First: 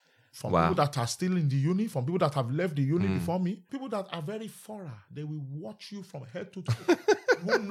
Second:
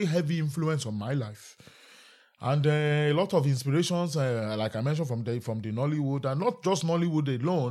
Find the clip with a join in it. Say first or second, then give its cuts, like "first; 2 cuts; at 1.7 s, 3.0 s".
first; 1 cut; at 3.7 s